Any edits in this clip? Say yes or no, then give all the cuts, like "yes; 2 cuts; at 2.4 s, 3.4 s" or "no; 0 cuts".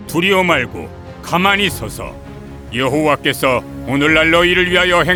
no; 0 cuts